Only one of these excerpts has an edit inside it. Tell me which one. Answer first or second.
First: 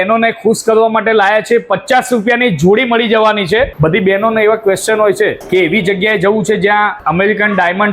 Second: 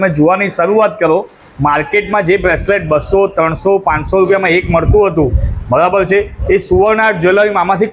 first